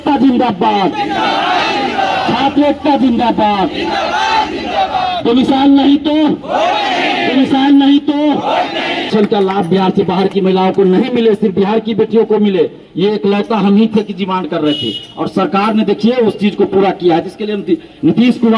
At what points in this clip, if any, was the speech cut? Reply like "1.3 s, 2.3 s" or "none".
9.0 s